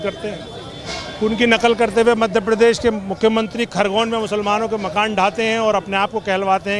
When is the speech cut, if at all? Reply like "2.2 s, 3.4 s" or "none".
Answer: none